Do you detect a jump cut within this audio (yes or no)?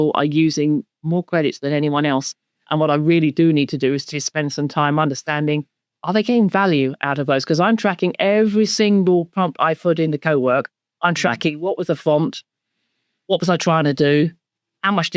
no